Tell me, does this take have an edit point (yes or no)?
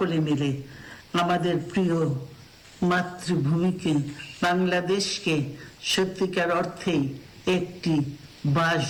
no